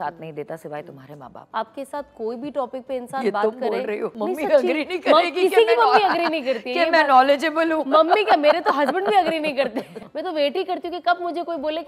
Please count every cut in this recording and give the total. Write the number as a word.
three